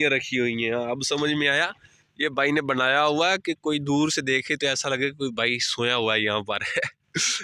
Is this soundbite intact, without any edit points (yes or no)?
yes